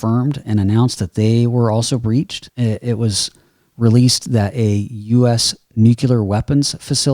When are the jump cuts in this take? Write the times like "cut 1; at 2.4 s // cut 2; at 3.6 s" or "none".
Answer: cut 1; at 2.4 s